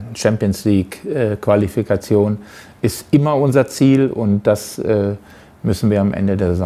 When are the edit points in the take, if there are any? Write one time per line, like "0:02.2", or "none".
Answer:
none